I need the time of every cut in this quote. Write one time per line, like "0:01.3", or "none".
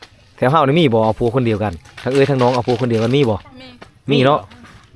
none